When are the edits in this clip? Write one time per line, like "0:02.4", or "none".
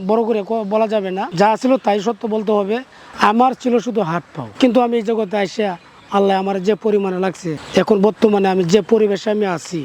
0:01.2
0:04.3